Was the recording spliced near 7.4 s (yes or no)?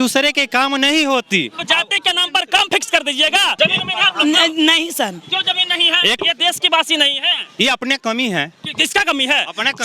no